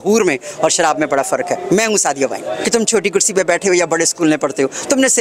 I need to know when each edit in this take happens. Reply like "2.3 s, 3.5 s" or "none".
2.6 s